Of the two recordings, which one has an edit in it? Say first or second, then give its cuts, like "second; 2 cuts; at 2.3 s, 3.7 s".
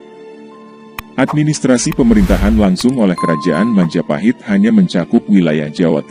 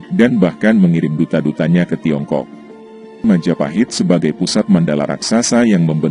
second; 1 cut; at 3.2 s